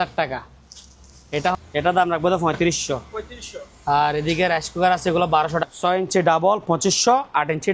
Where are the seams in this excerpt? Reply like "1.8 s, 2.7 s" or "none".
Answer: 1.6 s, 5.6 s